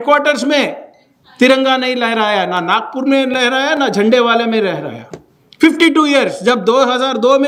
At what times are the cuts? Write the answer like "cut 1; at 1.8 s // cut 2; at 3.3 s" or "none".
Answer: none